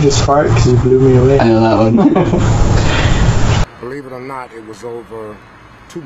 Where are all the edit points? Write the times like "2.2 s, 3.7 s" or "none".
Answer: 3.6 s